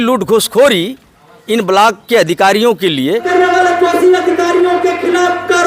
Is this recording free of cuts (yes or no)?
no